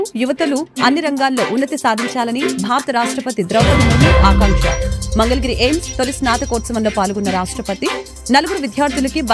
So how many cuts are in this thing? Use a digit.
0